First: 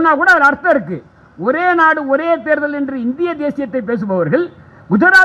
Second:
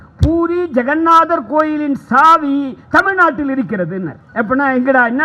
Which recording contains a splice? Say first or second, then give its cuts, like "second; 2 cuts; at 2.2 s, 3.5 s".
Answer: second; 1 cut; at 4.2 s